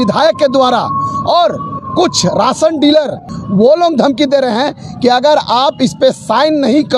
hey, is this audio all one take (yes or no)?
no